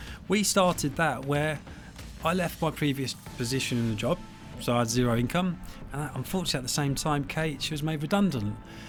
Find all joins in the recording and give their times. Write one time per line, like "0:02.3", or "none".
none